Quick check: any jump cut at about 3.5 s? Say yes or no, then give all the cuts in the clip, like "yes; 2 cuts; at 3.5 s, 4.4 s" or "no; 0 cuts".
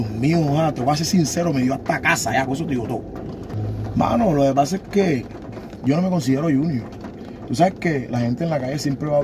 yes; 1 cut; at 3.5 s